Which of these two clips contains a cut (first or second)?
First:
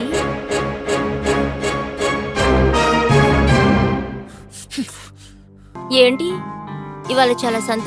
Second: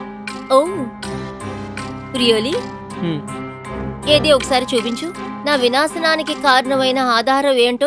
first